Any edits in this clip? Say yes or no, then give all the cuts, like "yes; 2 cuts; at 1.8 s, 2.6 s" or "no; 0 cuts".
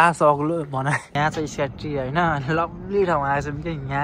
yes; 1 cut; at 1.1 s